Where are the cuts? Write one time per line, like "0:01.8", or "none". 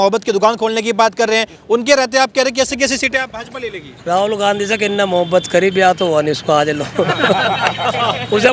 none